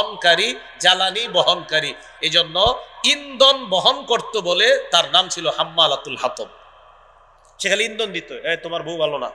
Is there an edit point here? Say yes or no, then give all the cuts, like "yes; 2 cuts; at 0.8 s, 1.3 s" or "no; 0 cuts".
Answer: no; 0 cuts